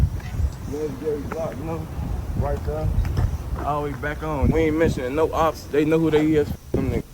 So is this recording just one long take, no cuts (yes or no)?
no